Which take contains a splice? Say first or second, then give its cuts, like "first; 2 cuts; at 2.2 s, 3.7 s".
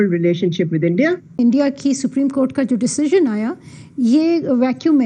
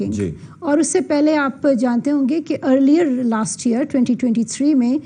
first; 1 cut; at 1.3 s